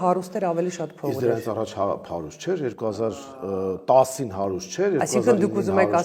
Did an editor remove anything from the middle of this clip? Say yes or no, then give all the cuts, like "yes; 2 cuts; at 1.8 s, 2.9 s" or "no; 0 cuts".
no; 0 cuts